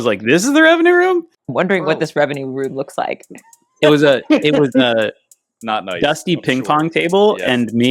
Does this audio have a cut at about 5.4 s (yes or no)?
no